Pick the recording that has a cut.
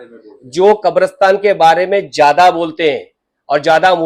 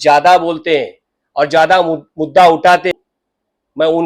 second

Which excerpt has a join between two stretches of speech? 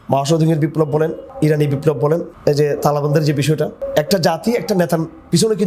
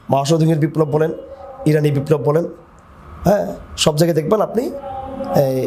first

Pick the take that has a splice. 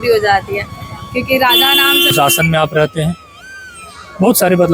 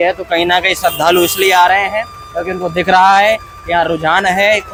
first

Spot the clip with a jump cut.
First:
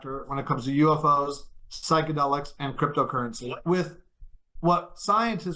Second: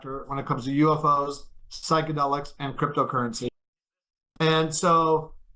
first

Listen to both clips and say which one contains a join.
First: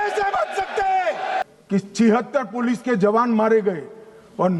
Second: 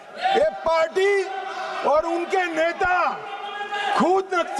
first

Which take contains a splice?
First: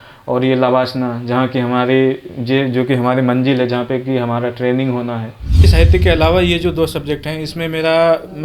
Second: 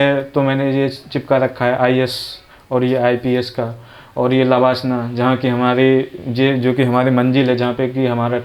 first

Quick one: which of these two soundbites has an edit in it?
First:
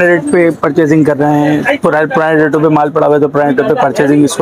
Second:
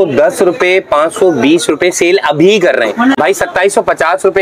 second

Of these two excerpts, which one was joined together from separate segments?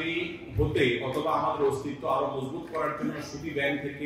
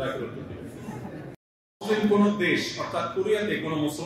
second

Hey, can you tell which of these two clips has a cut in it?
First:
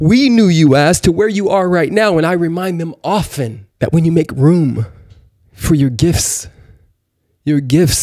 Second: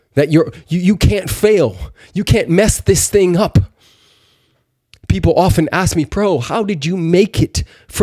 first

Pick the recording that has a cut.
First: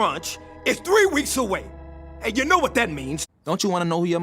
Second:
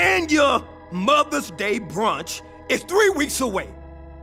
first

